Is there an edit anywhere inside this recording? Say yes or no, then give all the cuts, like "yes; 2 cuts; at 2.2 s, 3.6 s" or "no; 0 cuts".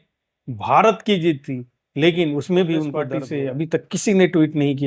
yes; 1 cut; at 3.2 s